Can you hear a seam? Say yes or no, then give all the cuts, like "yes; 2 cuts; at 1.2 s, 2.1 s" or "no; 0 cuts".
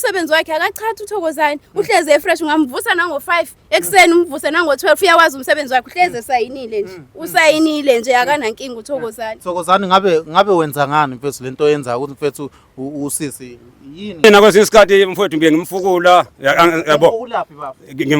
yes; 1 cut; at 14.2 s